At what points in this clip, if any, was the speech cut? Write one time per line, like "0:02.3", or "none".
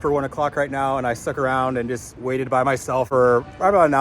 0:03.1